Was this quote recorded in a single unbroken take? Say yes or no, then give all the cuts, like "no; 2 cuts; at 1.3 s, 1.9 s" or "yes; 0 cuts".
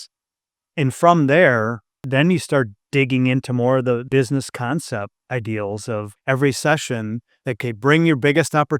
no; 6 cuts; at 2.0 s, 2.8 s, 4.0 s, 5.2 s, 6.1 s, 7.6 s